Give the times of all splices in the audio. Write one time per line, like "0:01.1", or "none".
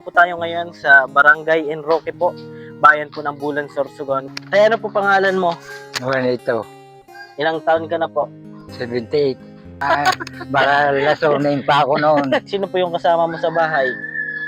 0:04.2
0:09.8
0:12.4